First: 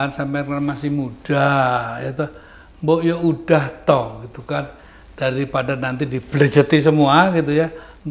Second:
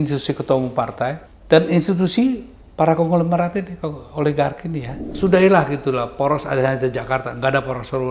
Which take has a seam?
second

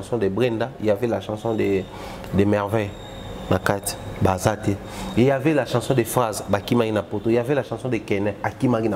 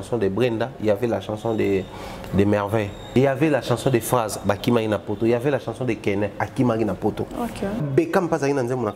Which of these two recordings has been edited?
second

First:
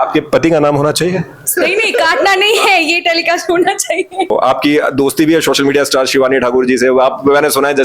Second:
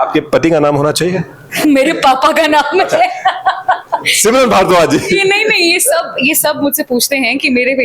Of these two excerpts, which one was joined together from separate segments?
first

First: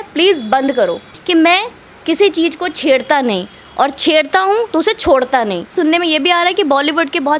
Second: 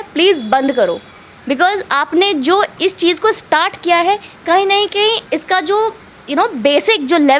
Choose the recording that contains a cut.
first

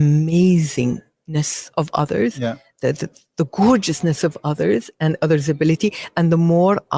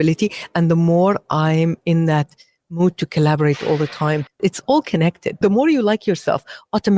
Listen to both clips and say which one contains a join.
second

